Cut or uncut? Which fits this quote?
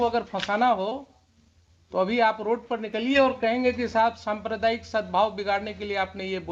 uncut